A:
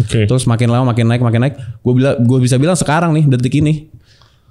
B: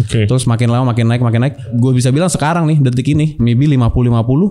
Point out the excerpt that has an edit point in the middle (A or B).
B